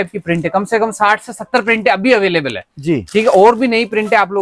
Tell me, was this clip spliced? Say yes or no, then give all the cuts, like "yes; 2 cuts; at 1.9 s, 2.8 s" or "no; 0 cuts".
no; 0 cuts